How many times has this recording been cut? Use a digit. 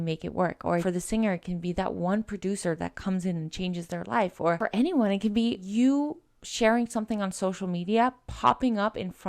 2